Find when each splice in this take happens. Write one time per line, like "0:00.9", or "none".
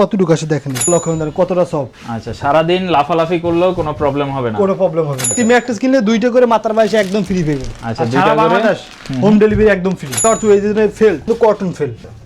0:00.8
0:05.3
0:10.2
0:11.3

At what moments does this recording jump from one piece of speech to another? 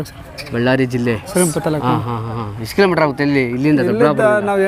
none

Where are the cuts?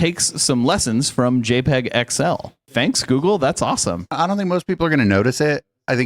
0:02.7
0:04.1

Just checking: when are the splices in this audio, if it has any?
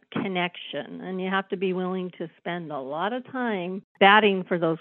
0:03.8

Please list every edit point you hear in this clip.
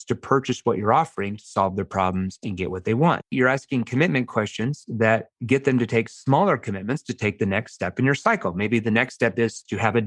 0:03.3

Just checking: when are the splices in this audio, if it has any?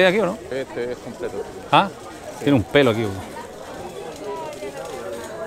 none

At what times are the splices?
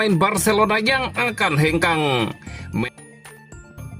0:02.9

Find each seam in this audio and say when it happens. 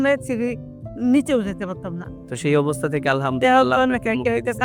none

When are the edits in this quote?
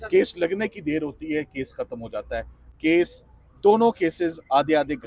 none

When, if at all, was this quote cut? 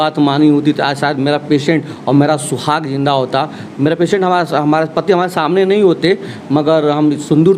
none

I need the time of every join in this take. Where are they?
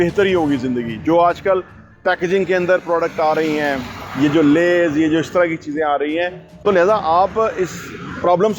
0:06.4

